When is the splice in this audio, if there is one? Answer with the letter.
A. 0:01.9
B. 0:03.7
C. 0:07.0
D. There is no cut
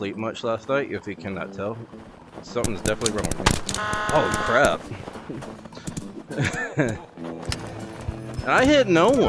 D